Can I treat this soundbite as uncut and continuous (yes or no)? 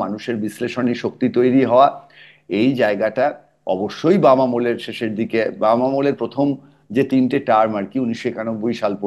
yes